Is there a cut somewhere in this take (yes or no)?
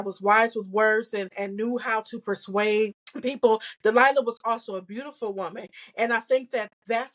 yes